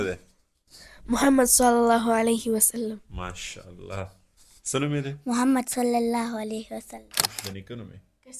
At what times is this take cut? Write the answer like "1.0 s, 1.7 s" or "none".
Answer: 7.3 s